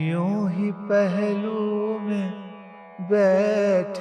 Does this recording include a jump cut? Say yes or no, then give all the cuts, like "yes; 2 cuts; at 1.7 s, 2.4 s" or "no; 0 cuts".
no; 0 cuts